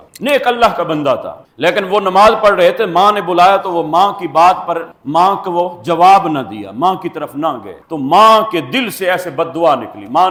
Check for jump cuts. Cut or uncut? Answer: uncut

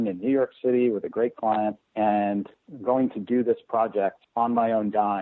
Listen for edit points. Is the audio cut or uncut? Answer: cut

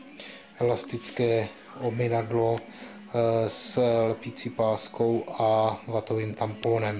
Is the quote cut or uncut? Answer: uncut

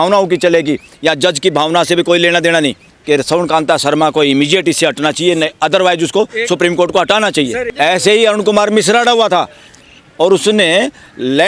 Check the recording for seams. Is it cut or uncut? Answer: cut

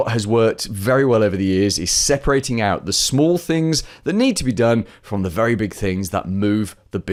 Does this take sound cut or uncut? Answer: uncut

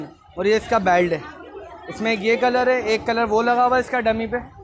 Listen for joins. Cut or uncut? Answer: uncut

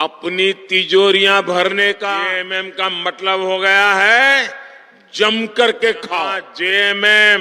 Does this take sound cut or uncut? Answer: cut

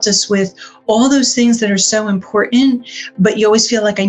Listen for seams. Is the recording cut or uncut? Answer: uncut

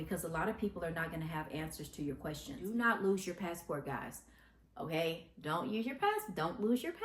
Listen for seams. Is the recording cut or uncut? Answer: cut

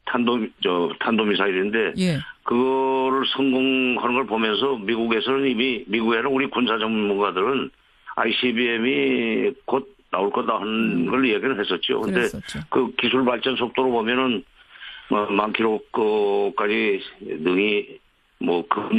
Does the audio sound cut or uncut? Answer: cut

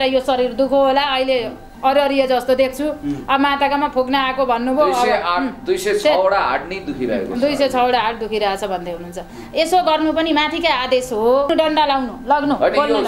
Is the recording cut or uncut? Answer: cut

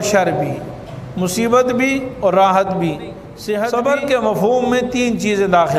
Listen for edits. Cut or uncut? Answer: cut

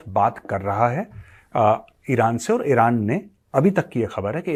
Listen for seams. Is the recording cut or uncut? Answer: uncut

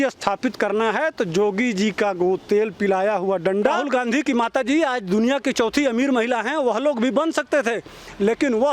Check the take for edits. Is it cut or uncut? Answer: cut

